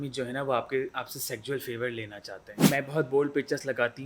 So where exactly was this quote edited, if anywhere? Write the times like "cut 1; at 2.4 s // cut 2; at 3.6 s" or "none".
cut 1; at 2.7 s